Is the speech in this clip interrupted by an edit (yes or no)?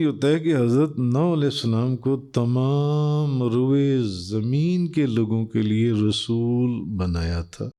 no